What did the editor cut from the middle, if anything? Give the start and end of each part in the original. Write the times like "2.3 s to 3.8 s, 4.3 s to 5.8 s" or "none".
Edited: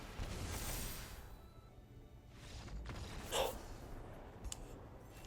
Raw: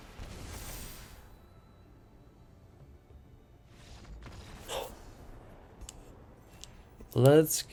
1.7 s to 3.0 s